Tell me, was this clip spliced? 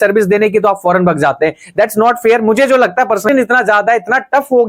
yes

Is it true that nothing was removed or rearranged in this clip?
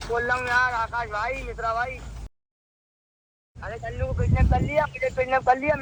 yes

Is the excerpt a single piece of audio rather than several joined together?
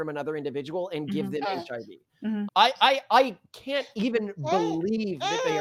yes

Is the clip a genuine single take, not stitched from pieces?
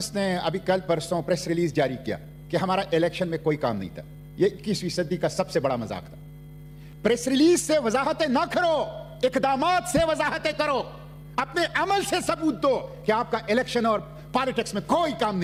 yes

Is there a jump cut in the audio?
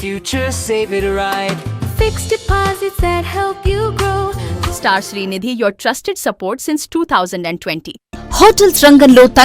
yes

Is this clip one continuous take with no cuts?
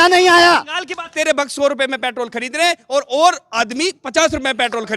no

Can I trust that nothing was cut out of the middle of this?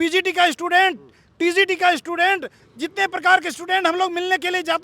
no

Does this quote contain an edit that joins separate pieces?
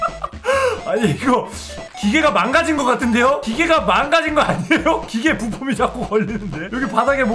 no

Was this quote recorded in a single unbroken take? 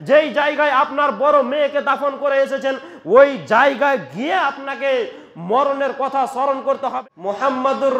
no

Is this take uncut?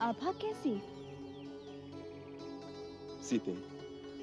yes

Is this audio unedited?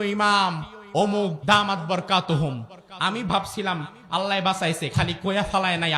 no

